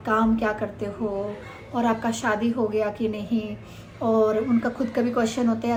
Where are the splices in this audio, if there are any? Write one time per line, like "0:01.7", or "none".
none